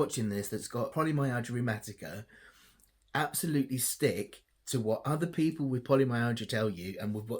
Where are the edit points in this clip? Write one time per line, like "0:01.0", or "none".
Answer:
0:00.9